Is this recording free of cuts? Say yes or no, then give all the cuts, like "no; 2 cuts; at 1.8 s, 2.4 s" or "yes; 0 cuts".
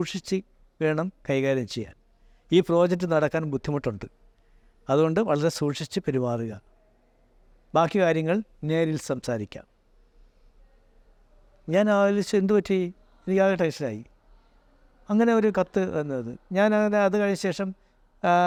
yes; 0 cuts